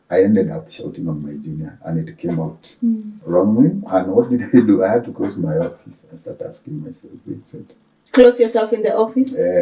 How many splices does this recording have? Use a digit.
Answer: 1